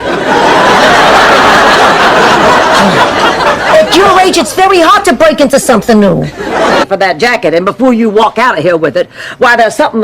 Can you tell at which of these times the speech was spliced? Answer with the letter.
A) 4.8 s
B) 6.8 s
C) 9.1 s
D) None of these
B